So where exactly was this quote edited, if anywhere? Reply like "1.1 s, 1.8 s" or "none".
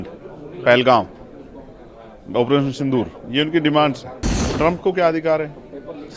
4.4 s